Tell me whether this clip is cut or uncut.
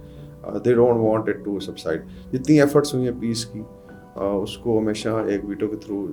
uncut